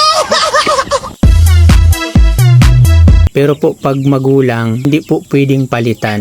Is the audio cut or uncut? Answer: cut